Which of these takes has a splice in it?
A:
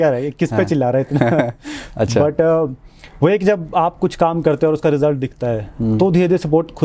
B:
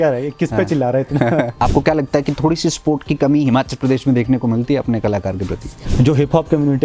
B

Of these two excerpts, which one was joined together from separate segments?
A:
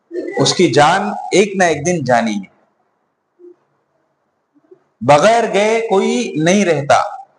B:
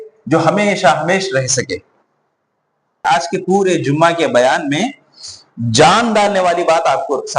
B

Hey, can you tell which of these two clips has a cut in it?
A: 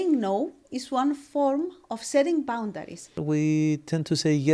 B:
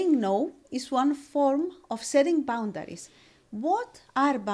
A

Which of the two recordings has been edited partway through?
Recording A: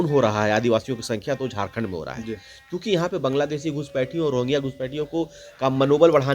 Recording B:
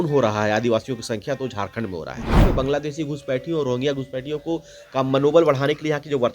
B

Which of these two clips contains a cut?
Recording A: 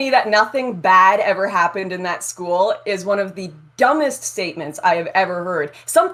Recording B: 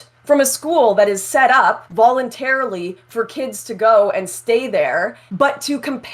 B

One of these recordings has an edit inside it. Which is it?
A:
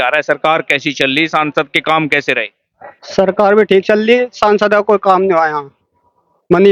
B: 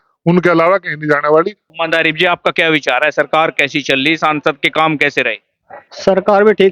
B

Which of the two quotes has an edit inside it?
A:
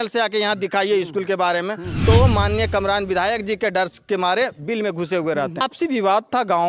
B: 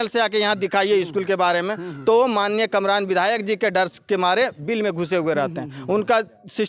A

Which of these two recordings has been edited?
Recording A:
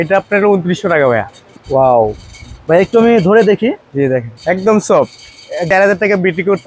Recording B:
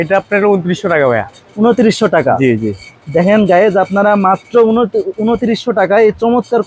A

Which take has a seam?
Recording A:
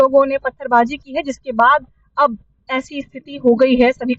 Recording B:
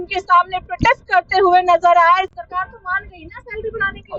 B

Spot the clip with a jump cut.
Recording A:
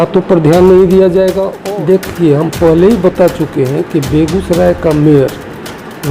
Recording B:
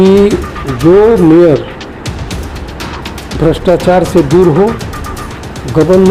A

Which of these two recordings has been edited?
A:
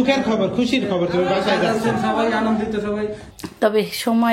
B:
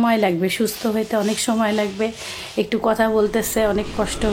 A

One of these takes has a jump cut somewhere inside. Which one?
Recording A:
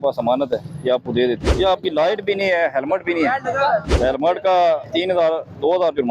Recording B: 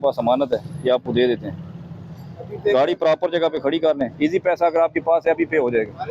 A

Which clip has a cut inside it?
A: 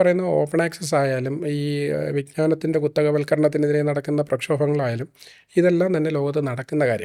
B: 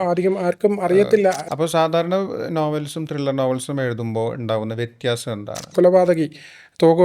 B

